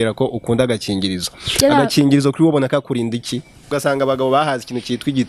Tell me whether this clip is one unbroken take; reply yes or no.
no